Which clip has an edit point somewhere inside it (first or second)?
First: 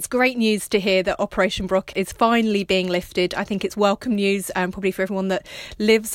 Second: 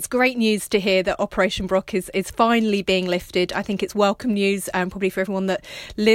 first